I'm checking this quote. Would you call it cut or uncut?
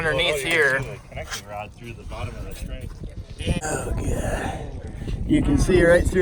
cut